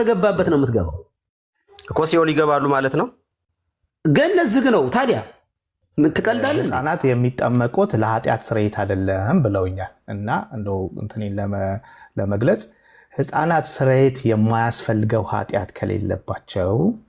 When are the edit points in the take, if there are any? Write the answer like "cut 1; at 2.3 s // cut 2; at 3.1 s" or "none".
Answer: cut 1; at 6.7 s